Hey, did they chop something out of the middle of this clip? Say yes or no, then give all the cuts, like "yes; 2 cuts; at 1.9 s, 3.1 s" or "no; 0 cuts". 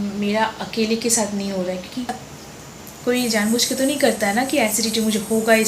yes; 1 cut; at 2.1 s